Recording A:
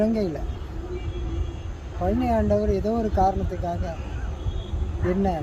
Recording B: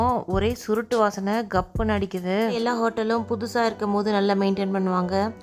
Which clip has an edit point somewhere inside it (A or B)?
B